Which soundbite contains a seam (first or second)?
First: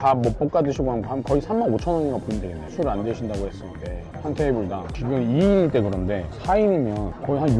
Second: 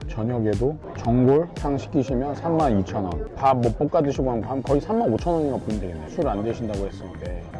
second